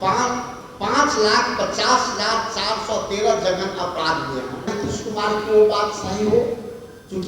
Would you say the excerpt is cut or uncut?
cut